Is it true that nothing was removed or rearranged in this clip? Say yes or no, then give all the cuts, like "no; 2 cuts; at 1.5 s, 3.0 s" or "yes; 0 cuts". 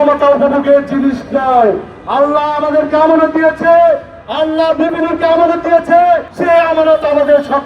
no; 1 cut; at 6.3 s